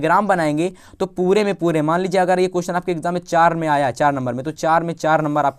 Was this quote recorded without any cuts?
yes; 0 cuts

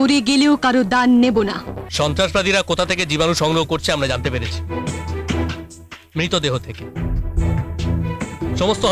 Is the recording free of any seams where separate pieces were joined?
no; 1 cut; at 1.8 s

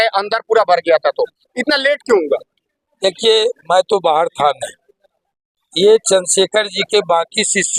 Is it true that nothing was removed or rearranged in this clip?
yes; 0 cuts

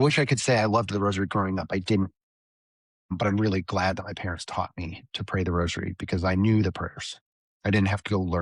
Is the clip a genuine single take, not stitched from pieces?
yes; 0 cuts

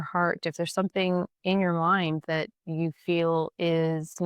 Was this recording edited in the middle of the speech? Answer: no; 0 cuts

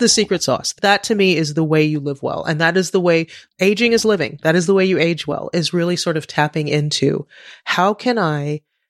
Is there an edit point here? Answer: no; 0 cuts

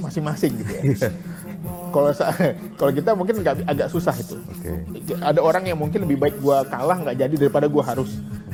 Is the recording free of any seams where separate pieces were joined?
yes; 0 cuts

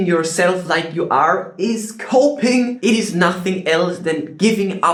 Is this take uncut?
yes; 0 cuts

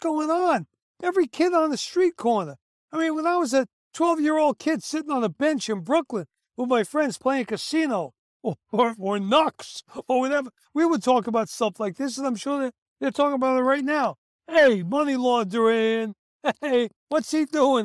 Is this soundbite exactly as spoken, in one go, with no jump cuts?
yes; 0 cuts

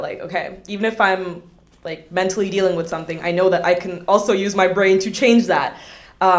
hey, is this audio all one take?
yes; 0 cuts

